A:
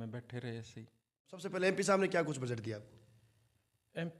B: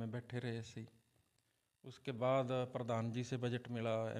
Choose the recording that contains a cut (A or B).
A